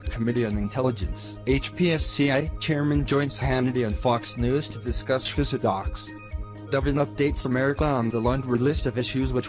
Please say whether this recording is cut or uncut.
cut